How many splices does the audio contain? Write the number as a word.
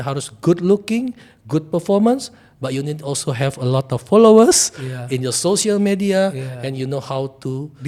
zero